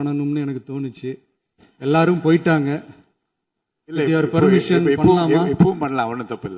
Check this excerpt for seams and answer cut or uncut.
uncut